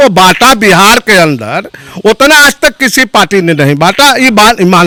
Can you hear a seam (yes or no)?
no